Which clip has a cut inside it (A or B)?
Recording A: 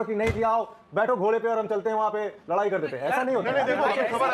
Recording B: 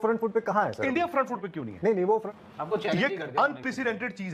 B